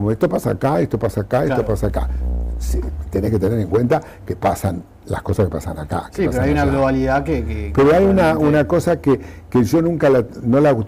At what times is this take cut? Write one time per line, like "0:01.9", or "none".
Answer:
0:07.2